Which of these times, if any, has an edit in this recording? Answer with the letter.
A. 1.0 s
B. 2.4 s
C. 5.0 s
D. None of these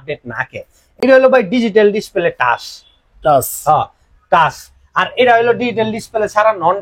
D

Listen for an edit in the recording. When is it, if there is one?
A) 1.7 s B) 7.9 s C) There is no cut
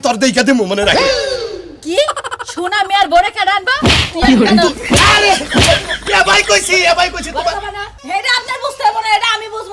B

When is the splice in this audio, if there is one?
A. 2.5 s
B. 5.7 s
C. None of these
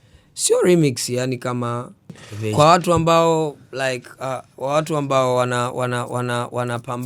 A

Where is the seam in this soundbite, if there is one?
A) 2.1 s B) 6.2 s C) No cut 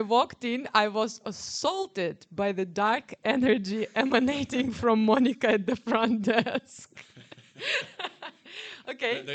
C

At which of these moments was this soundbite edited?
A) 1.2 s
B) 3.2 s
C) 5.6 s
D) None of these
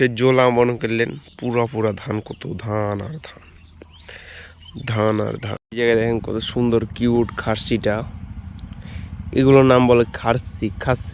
C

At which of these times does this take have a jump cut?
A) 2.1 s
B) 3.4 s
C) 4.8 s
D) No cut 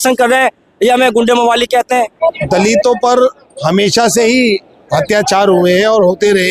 A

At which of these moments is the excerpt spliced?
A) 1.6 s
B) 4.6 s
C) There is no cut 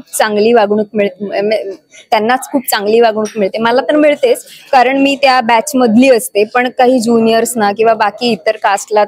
C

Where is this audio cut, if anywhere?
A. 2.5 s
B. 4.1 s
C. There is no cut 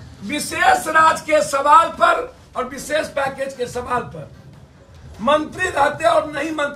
C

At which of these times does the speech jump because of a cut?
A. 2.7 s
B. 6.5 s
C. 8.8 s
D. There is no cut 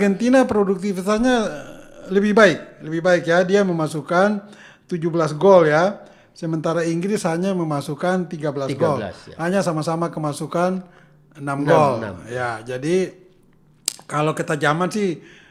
D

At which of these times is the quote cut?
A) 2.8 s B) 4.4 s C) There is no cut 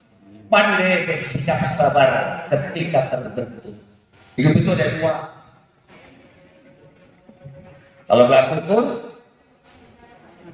B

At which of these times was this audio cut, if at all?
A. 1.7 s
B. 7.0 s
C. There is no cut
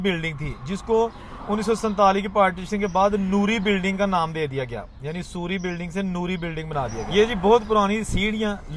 B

